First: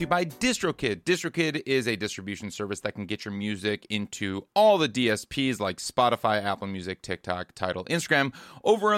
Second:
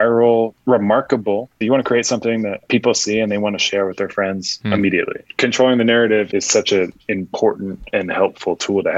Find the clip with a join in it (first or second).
second